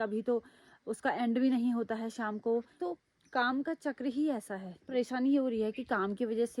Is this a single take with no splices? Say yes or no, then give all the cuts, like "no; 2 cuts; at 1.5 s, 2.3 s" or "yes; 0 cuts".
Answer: no; 2 cuts; at 2.7 s, 4.8 s